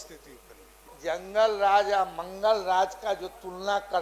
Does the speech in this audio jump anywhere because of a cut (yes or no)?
yes